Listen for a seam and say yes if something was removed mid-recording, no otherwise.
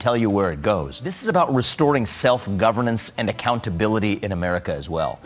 yes